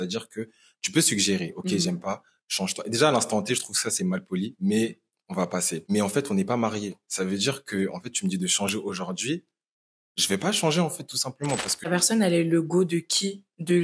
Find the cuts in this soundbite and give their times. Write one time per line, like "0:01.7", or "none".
0:05.9
0:11.9